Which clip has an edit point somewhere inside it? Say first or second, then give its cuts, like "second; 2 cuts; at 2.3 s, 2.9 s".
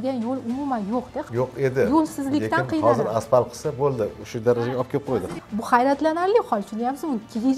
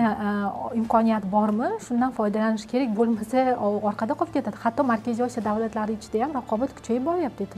first; 2 cuts; at 1.3 s, 5.1 s